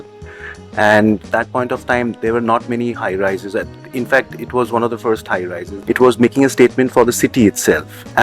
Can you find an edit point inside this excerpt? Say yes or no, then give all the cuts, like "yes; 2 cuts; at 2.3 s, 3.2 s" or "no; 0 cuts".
yes; 2 cuts; at 1.2 s, 5.7 s